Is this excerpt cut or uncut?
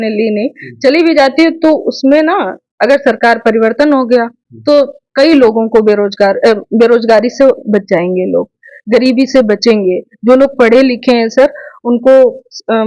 uncut